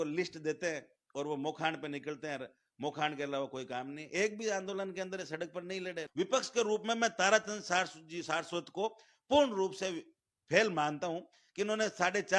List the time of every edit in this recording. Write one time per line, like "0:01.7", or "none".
0:06.0